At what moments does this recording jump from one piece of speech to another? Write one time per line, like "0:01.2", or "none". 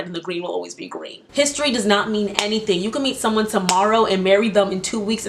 0:01.3